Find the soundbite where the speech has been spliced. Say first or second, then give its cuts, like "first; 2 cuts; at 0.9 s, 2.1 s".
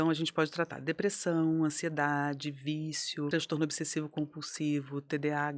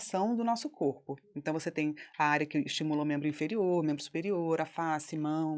first; 1 cut; at 3.3 s